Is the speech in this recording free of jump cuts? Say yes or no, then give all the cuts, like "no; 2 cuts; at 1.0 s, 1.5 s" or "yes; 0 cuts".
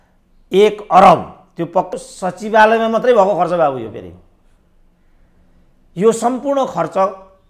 no; 1 cut; at 1.9 s